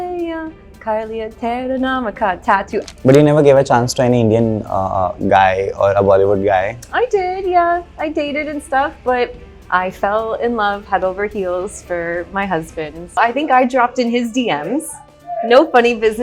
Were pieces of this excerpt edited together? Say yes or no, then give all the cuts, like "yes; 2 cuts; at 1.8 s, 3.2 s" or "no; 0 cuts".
yes; 2 cuts; at 2.8 s, 13.2 s